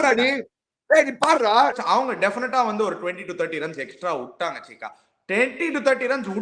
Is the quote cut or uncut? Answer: cut